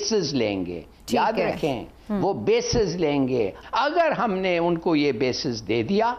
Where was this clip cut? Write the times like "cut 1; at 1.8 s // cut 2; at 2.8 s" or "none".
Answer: cut 1; at 3.6 s